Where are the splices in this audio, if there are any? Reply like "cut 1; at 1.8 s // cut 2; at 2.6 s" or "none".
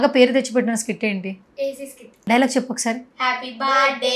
cut 1; at 2.1 s